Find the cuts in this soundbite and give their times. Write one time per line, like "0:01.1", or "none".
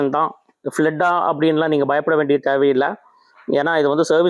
none